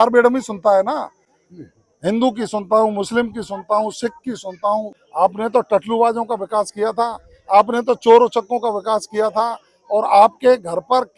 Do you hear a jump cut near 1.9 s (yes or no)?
no